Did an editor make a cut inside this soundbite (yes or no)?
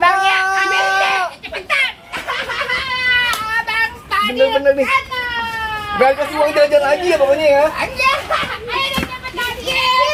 no